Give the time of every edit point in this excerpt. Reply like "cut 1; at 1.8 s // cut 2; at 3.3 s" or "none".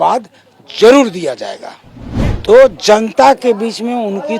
cut 1; at 2.4 s

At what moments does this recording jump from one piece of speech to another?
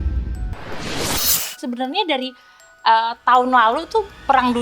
cut 1; at 1.5 s

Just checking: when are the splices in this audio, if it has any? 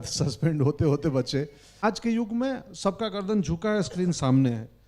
cut 1; at 1.8 s

